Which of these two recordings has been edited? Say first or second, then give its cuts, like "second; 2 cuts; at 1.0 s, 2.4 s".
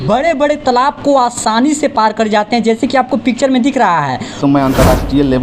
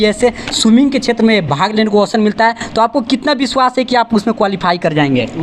first; 1 cut; at 4.4 s